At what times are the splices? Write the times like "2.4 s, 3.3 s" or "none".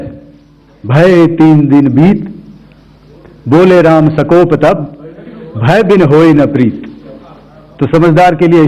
none